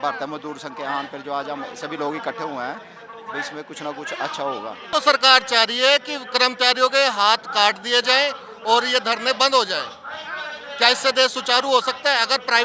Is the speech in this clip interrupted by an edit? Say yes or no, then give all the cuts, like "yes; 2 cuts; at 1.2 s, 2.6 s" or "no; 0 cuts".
yes; 1 cut; at 4.8 s